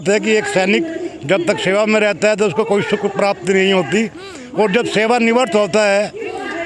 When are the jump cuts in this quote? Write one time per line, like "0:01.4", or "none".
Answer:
none